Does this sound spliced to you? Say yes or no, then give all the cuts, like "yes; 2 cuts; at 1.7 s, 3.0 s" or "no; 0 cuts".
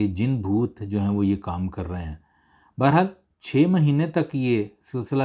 no; 0 cuts